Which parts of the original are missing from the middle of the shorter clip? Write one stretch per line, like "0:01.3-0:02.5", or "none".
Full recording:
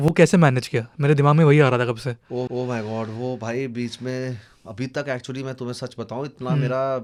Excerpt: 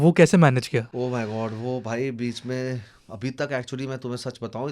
0:00.9-0:02.5